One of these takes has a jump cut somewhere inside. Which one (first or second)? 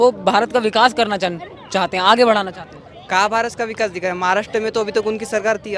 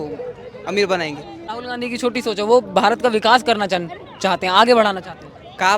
second